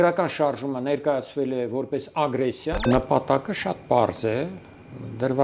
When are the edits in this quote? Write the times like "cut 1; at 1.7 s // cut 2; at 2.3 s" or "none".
cut 1; at 2.8 s